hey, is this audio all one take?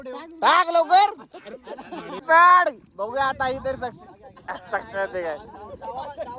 no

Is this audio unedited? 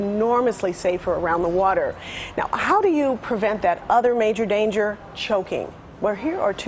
yes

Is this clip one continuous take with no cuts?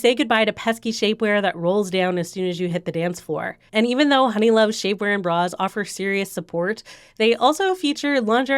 no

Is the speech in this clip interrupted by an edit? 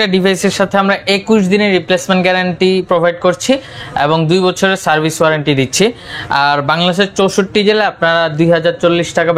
no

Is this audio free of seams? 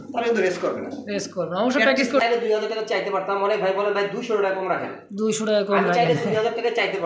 no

